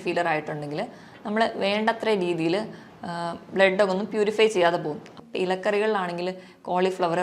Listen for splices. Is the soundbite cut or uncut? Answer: cut